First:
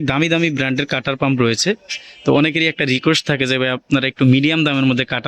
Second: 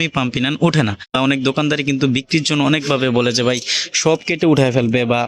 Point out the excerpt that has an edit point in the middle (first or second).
second